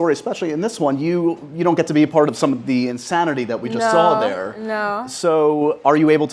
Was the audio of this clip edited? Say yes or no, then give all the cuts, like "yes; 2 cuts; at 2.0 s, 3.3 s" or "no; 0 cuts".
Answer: no; 0 cuts